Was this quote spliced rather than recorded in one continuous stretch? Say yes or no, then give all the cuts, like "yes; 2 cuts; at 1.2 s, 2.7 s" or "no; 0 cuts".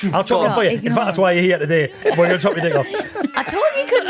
yes; 2 cuts; at 2.0 s, 3.3 s